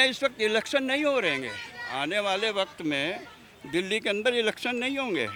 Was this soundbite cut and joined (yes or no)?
no